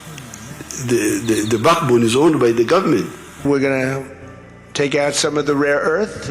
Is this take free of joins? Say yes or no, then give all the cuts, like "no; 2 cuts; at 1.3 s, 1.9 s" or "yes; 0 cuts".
no; 1 cut; at 3.4 s